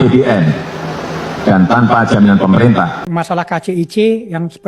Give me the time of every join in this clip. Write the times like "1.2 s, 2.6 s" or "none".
3.0 s